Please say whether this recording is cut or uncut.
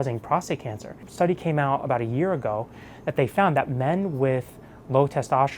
cut